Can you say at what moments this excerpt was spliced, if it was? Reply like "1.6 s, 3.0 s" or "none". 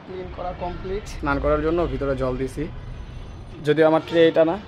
1.1 s